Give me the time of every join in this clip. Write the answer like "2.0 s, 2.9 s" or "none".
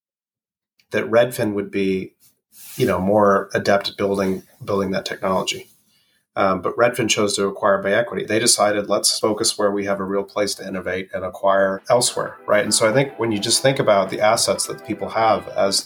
8.3 s, 9.1 s, 11.8 s